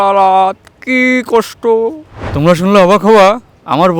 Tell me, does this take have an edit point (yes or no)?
yes